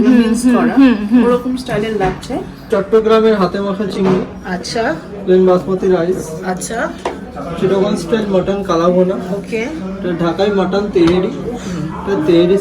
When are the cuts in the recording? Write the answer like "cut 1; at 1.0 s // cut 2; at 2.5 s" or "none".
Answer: cut 1; at 2.7 s